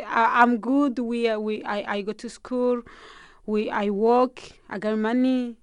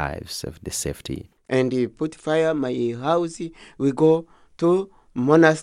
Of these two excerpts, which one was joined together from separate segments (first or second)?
second